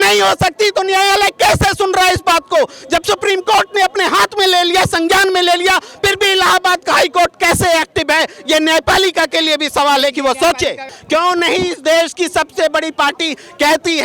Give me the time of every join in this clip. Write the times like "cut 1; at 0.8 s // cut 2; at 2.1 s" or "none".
cut 1; at 10.9 s